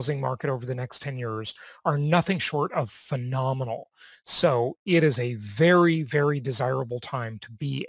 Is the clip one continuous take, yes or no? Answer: yes